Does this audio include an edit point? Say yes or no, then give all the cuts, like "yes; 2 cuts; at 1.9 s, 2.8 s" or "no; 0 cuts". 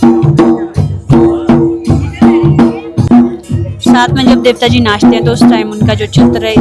yes; 1 cut; at 3.0 s